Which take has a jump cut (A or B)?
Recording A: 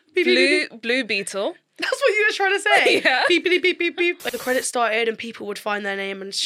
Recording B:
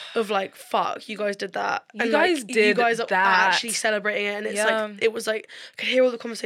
A